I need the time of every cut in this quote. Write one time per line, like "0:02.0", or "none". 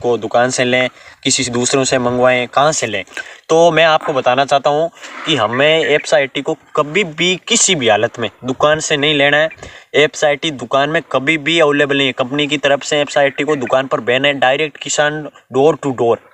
none